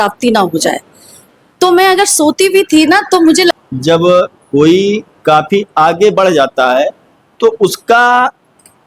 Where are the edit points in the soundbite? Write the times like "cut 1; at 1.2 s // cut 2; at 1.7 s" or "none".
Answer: cut 1; at 3.6 s